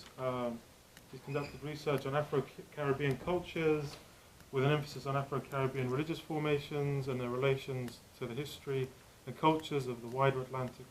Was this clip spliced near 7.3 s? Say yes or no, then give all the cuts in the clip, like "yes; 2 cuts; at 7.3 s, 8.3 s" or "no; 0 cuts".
yes; 1 cut; at 7.3 s